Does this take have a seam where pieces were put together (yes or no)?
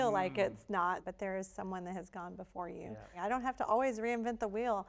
yes